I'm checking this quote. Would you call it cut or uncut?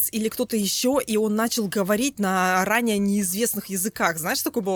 uncut